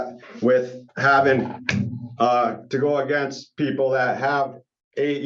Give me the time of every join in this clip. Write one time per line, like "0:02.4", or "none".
none

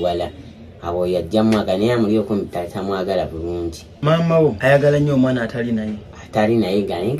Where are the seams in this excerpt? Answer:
0:03.9
0:04.6

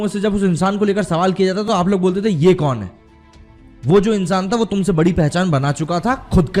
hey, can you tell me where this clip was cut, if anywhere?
none

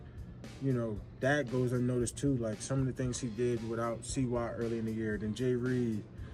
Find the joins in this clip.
0:02.6

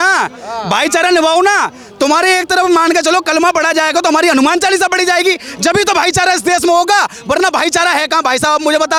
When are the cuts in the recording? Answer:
none

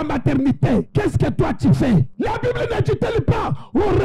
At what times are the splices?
0:00.9
0:02.1

